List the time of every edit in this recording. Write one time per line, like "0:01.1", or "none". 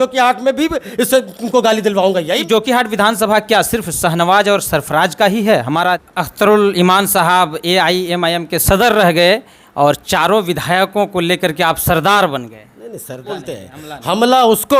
0:02.2
0:06.0
0:13.3